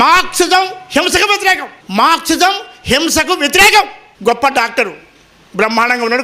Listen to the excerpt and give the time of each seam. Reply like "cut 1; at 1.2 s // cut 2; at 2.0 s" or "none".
cut 1; at 1.7 s // cut 2; at 4.0 s